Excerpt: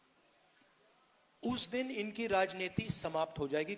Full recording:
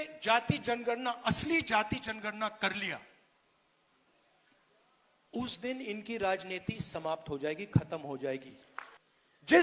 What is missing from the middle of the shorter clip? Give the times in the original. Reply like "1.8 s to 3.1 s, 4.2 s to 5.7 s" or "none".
none